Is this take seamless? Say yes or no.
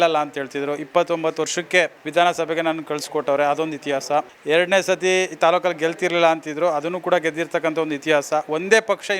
no